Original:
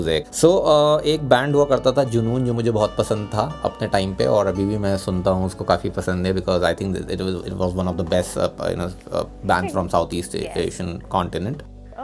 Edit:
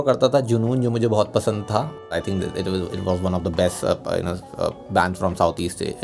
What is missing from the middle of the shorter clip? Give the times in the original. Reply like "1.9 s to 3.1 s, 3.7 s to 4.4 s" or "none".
3.8 s to 6.7 s